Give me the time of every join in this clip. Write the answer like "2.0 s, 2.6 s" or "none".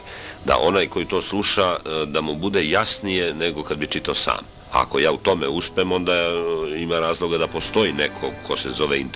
4.5 s